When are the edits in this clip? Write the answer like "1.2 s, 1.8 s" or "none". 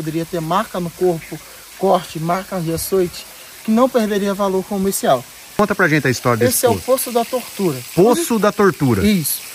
5.6 s